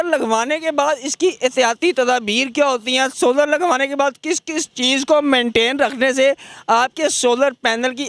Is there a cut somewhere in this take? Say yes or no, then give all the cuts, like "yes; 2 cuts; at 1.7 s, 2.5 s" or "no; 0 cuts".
no; 0 cuts